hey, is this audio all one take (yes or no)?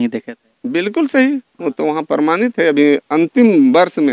yes